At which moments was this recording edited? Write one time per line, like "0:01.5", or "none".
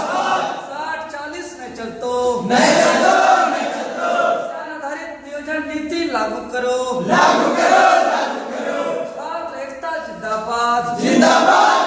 0:04.6